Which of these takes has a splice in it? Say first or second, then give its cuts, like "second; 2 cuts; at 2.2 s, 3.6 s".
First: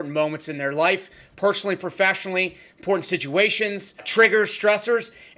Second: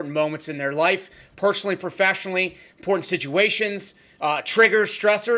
first; 1 cut; at 4.1 s